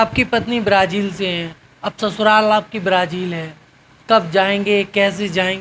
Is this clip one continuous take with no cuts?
yes; 0 cuts

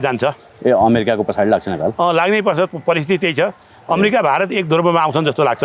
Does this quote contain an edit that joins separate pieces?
no; 0 cuts

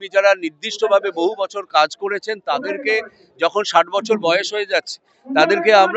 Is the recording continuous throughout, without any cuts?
yes; 0 cuts

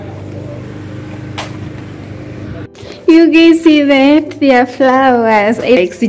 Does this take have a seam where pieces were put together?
yes; 1 cut; at 2.9 s

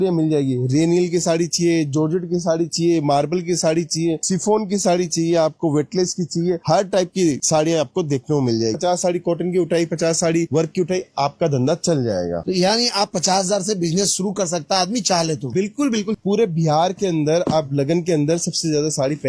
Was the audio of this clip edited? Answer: yes; 2 cuts; at 8.8 s, 16.1 s

